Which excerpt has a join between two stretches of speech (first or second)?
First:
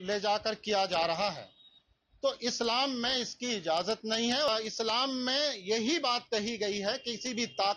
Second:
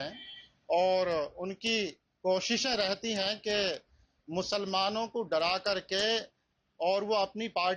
first